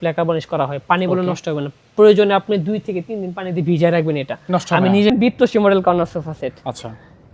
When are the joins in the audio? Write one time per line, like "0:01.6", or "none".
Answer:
0:05.1